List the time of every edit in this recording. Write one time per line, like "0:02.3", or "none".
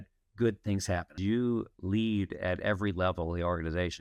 0:01.1